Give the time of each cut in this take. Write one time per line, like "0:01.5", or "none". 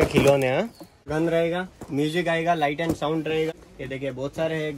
0:01.1
0:03.7